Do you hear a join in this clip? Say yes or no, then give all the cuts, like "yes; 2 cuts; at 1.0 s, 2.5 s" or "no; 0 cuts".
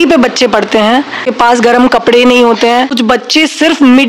yes; 2 cuts; at 1.3 s, 3.0 s